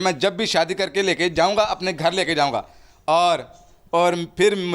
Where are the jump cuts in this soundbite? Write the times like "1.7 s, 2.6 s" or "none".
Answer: none